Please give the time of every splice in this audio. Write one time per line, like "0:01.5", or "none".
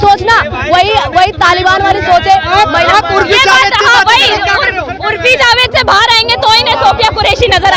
none